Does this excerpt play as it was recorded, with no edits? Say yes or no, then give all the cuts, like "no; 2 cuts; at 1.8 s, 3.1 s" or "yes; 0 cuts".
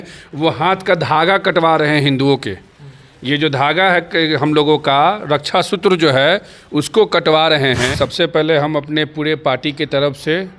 no; 1 cut; at 7.9 s